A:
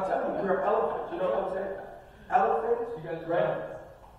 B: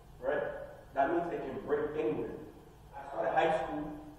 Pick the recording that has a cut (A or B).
B